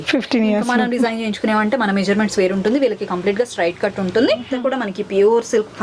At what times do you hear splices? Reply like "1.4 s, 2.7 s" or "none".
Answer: 4.5 s